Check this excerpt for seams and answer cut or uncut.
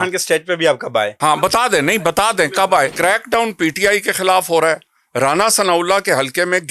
cut